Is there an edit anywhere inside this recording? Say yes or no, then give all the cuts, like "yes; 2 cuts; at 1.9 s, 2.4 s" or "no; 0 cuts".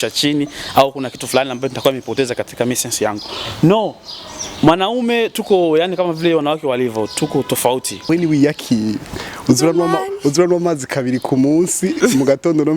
yes; 1 cut; at 8.1 s